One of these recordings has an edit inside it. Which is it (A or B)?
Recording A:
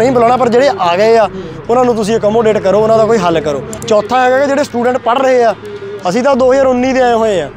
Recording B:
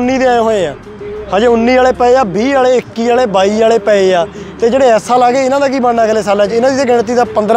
A